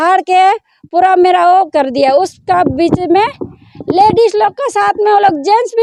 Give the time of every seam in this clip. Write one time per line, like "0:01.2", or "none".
none